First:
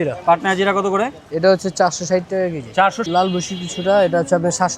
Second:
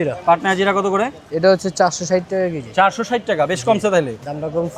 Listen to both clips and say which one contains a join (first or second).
first